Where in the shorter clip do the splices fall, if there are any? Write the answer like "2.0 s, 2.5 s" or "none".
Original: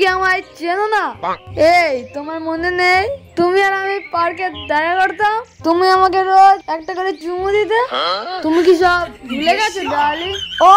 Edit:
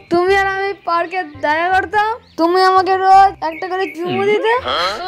none